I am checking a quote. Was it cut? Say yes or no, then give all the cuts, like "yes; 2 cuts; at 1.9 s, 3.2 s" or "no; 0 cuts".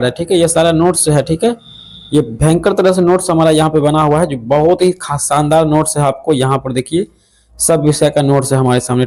no; 0 cuts